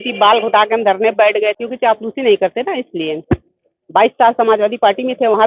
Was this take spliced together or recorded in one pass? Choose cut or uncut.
cut